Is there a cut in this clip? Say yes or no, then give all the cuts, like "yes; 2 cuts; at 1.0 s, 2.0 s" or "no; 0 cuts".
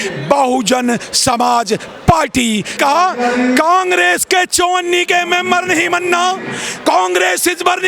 yes; 1 cut; at 2.7 s